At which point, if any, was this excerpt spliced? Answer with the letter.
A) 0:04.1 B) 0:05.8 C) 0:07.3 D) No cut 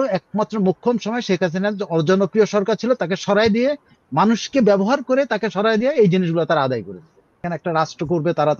C